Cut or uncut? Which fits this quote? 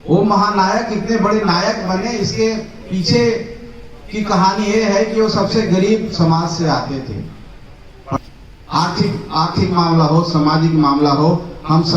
cut